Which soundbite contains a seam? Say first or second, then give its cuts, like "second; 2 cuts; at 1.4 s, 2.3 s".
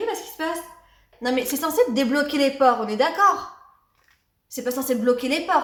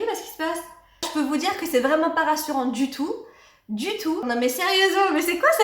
second; 2 cuts; at 1.1 s, 4.2 s